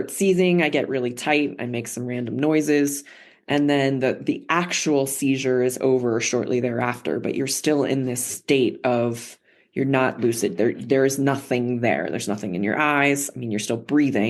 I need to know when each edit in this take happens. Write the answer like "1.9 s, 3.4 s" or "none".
none